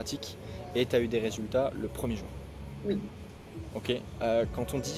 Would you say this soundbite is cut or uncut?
uncut